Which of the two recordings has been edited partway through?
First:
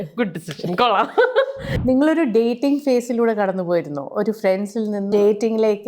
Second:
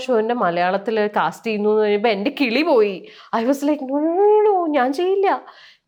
first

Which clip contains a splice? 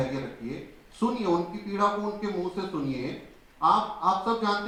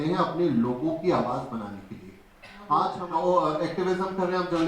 second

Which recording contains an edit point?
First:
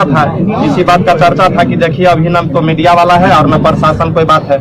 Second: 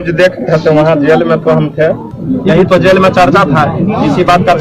second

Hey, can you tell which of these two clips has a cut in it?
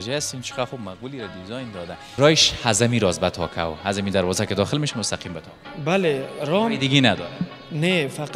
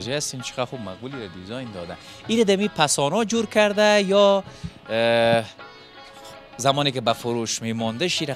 first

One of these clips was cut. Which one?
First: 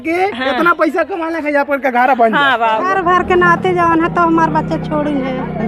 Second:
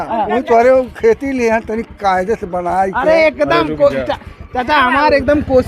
first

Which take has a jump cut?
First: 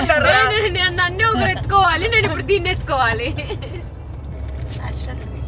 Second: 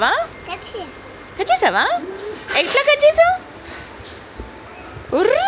first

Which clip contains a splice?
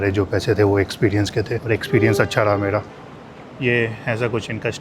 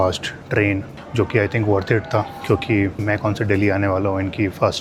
first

